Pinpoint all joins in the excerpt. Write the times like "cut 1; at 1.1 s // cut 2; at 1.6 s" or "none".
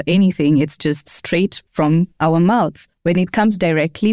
cut 1; at 2.9 s